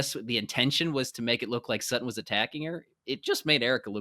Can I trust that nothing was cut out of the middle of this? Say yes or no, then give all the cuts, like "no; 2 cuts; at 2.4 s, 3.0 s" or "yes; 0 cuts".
yes; 0 cuts